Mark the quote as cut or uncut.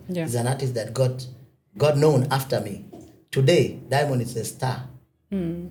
uncut